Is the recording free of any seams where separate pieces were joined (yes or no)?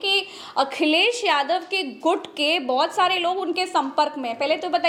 yes